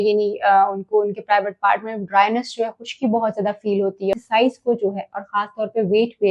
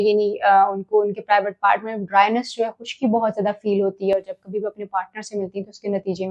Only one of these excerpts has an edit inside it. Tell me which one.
first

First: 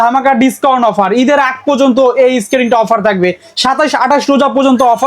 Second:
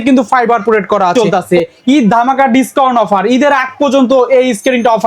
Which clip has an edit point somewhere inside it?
second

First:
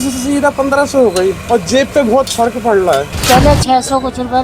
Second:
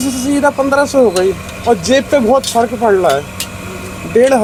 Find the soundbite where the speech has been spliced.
first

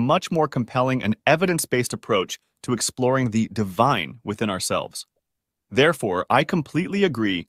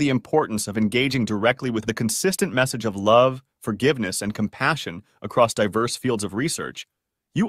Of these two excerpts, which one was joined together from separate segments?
second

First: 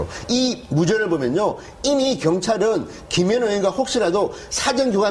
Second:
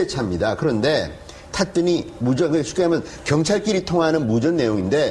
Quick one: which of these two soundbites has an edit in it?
second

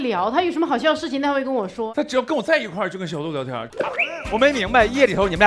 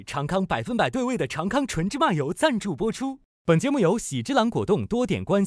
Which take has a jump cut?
first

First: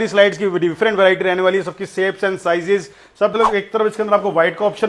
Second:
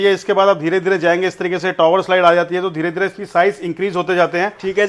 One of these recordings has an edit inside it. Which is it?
first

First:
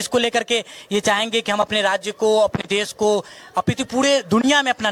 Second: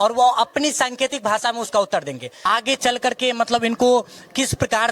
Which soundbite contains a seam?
second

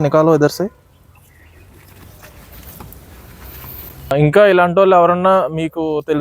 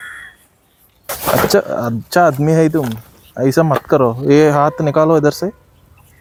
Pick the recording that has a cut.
first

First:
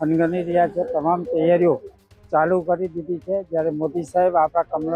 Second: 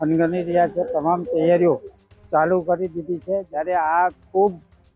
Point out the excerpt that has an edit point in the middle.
second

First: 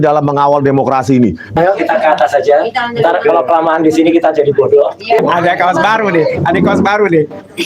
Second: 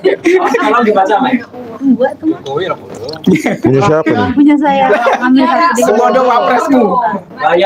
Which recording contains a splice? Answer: first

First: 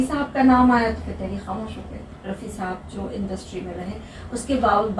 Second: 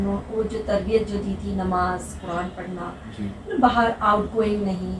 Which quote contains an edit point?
first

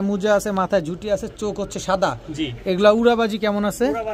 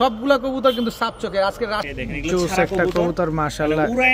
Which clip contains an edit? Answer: second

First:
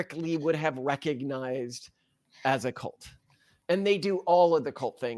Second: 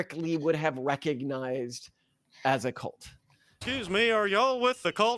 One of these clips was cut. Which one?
second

